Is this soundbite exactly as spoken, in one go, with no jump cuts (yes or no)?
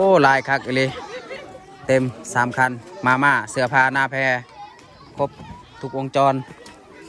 yes